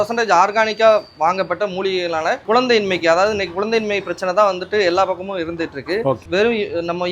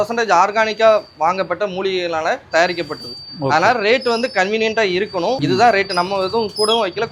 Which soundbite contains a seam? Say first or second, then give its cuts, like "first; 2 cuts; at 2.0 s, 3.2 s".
first; 2 cuts; at 2.4 s, 6.2 s